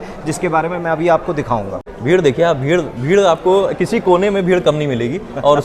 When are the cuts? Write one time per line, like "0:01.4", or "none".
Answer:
0:01.8